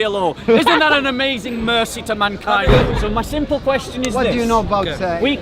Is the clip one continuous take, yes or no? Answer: no